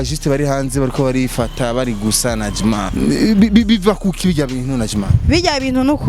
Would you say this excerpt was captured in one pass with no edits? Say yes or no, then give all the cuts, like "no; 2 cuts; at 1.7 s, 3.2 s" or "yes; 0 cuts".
no; 1 cut; at 2.9 s